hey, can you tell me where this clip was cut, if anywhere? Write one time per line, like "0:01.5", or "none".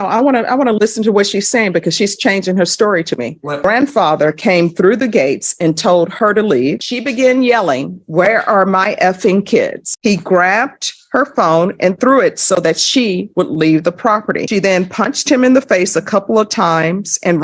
0:03.6
0:06.9
0:09.9
0:14.5